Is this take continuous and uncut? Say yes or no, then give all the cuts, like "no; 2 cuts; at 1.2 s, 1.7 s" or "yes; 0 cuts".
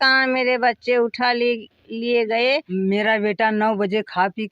no; 1 cut; at 2.7 s